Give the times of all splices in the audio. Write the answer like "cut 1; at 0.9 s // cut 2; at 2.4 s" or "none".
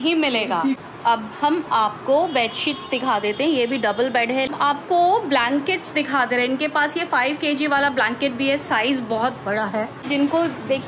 cut 1; at 0.8 s // cut 2; at 4.5 s // cut 3; at 10.1 s